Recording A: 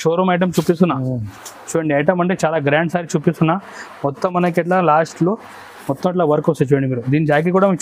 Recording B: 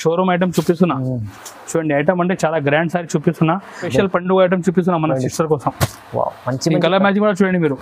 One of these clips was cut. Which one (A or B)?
B